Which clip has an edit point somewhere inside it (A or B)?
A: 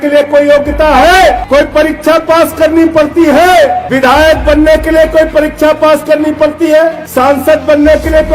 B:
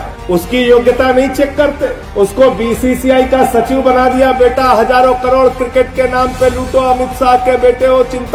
A